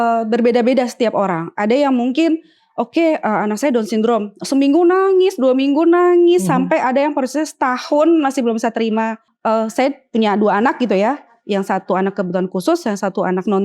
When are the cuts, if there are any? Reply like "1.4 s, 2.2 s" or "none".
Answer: 9.2 s